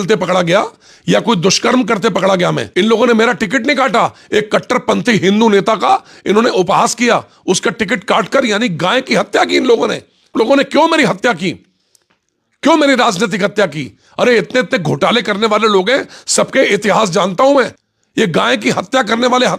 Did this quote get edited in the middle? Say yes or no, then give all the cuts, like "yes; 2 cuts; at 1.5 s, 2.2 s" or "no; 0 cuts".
yes; 3 cuts; at 2.6 s, 10.3 s, 17.8 s